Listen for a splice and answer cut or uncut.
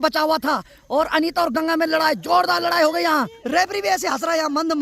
cut